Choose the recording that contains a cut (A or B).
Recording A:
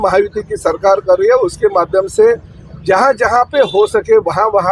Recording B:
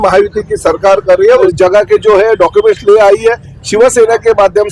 B